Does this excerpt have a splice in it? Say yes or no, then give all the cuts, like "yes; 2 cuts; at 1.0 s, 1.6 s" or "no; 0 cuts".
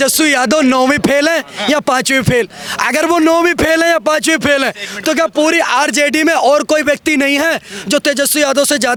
no; 0 cuts